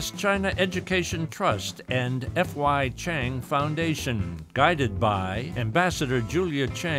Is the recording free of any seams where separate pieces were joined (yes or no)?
yes